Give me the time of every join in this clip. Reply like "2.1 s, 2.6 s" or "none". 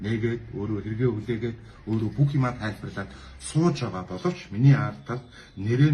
none